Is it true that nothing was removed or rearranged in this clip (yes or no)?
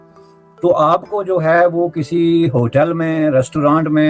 yes